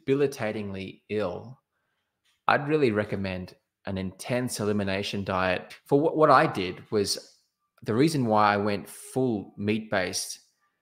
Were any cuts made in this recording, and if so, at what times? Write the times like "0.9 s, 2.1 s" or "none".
5.7 s